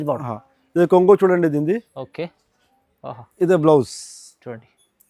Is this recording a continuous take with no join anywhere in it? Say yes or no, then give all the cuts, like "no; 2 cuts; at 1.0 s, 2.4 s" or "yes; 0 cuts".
yes; 0 cuts